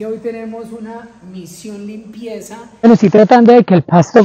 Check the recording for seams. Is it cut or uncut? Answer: cut